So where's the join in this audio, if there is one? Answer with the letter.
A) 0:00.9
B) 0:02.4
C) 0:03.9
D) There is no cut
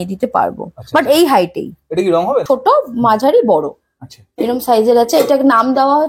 B